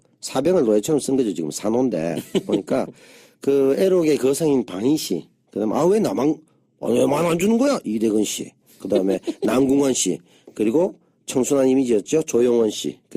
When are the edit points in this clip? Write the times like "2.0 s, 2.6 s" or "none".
7.1 s